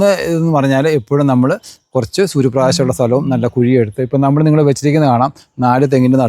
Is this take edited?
no; 0 cuts

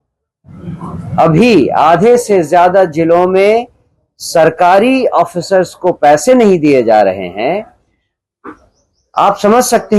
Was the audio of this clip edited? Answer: no; 0 cuts

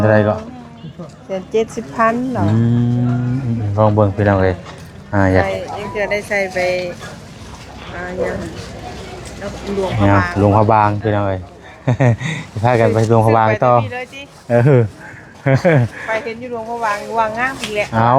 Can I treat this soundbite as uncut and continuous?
yes; 0 cuts

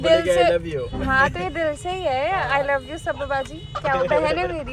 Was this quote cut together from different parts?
no; 0 cuts

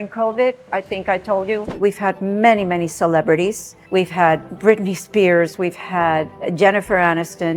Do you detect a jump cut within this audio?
yes; 2 cuts; at 1.7 s, 3.8 s

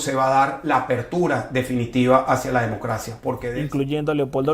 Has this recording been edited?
yes; 1 cut; at 3.3 s

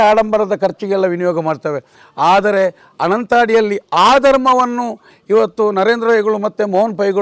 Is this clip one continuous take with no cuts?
yes; 0 cuts

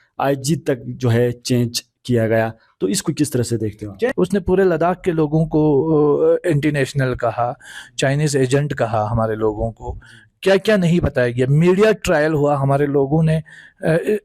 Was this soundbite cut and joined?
yes; 1 cut; at 4.1 s

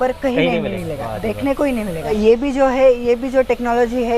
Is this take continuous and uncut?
no; 1 cut; at 2.1 s

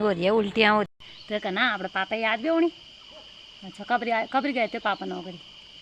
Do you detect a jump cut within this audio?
yes; 1 cut; at 0.9 s

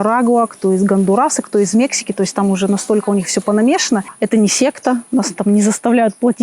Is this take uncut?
no; 1 cut; at 4.1 s

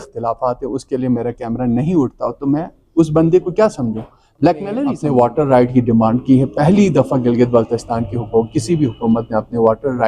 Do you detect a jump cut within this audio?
yes; 1 cut; at 5.0 s

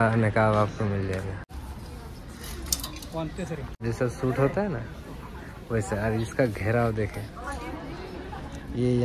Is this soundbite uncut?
no; 2 cuts; at 1.5 s, 3.7 s

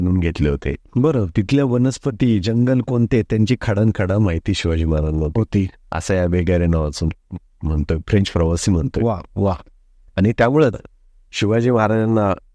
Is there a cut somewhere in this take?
no; 0 cuts

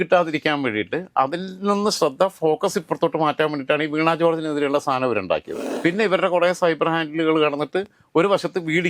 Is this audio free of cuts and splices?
no; 1 cut; at 5.6 s

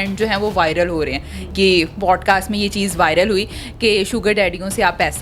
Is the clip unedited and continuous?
no; 1 cut; at 1.5 s

